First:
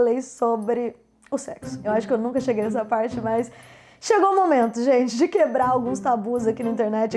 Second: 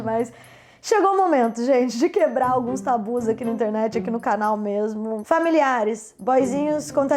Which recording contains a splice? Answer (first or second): second